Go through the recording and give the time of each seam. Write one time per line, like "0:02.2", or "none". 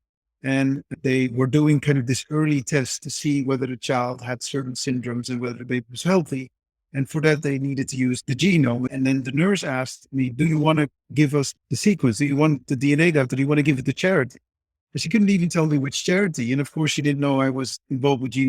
0:01.0
0:08.2
0:08.9
0:11.5